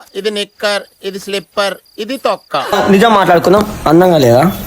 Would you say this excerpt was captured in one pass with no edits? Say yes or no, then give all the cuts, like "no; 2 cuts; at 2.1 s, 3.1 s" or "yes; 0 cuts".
no; 1 cut; at 2.8 s